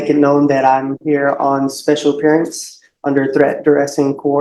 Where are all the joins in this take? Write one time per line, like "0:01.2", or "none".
none